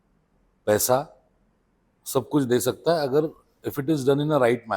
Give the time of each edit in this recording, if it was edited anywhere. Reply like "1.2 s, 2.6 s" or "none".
none